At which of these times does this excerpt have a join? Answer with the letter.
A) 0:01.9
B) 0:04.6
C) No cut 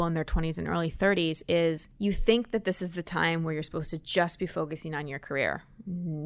A